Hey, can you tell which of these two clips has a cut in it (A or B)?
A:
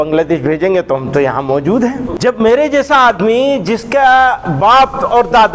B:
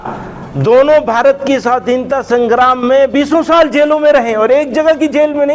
A